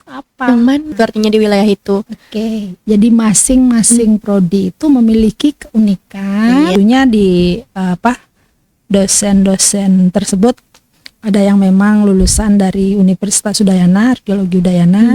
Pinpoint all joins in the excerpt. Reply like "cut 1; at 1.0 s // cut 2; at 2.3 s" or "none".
cut 1; at 0.9 s // cut 2; at 6.7 s